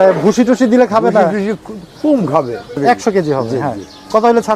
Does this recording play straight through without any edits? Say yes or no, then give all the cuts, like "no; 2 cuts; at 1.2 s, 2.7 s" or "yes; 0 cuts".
no; 1 cut; at 2.7 s